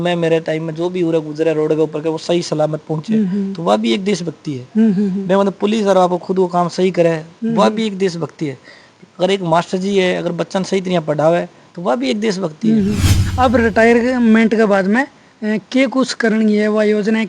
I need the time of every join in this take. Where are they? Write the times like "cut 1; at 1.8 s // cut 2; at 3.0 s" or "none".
cut 1; at 13.2 s